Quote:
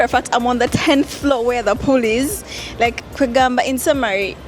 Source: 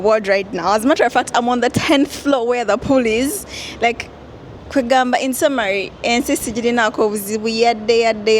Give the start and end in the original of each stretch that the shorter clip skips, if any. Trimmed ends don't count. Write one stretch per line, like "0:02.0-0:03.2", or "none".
0:04.1-0:04.6

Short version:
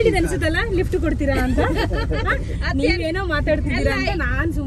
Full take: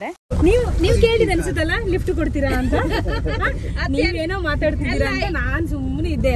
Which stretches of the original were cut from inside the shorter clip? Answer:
none

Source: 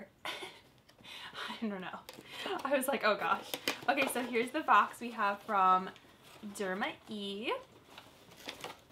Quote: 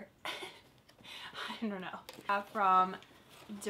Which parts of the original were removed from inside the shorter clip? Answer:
0:02.2-0:05.1

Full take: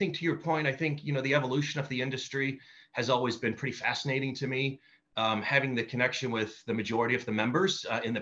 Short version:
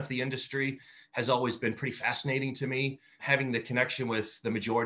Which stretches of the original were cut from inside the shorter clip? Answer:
0:05.0-0:05.5

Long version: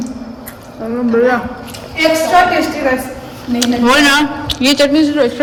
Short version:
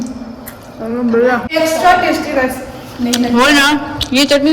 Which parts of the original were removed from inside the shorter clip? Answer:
0:01.5-0:01.9

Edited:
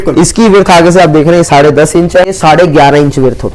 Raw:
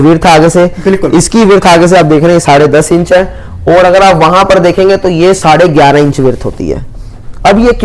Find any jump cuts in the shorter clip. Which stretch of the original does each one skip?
0:03.3-0:05.4

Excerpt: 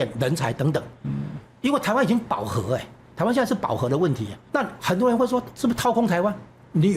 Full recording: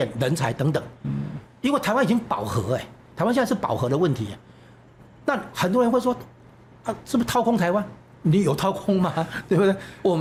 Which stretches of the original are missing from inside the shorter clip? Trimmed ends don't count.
0:04.3-0:05.1
0:06.2-0:07.0

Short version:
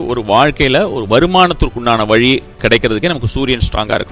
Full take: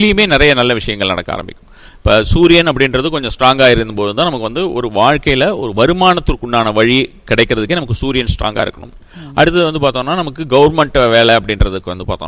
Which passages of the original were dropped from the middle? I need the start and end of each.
none

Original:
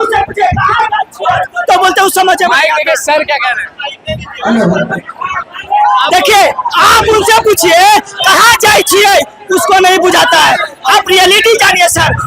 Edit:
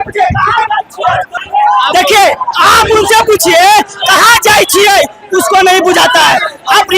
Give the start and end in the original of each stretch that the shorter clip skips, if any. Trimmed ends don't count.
0:01.6-0:05.5

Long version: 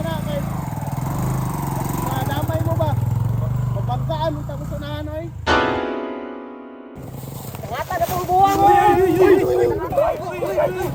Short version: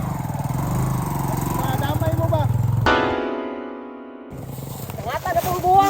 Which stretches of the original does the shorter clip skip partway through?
0:03.3-0:05.5

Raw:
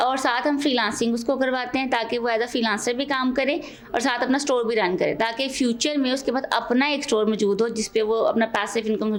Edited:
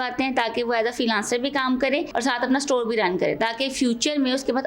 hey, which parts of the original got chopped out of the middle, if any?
0:03.6-0:03.9

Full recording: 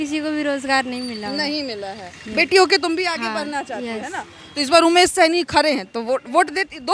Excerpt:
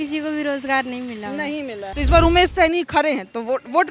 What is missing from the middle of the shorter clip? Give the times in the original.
0:01.9-0:04.5

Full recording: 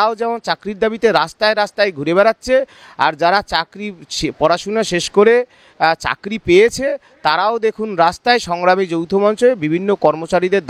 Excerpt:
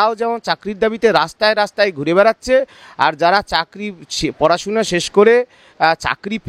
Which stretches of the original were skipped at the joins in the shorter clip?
none

